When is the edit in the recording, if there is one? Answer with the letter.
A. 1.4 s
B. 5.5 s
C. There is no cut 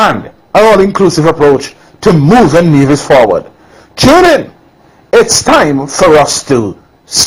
C